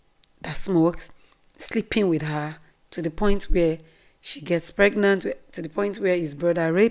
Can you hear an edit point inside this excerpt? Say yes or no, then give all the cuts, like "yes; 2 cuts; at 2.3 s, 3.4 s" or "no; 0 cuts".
no; 0 cuts